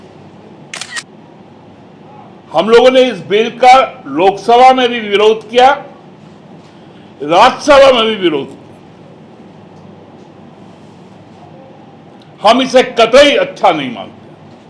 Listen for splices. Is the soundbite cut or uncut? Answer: cut